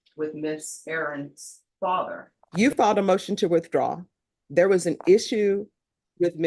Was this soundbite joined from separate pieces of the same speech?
yes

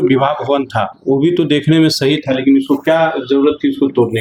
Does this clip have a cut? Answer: no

